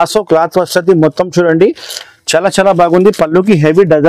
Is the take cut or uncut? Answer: uncut